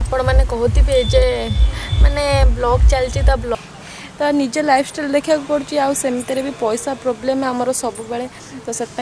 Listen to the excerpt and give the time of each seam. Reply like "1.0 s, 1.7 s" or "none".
3.5 s